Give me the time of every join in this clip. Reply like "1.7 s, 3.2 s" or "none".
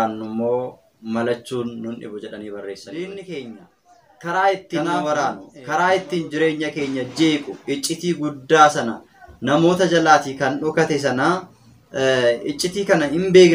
2.9 s